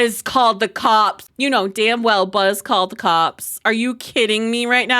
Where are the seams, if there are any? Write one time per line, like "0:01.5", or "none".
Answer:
0:01.2

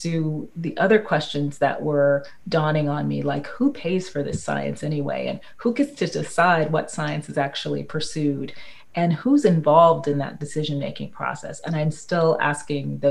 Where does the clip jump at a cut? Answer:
none

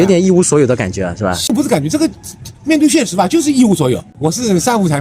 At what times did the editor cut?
0:01.5
0:04.1

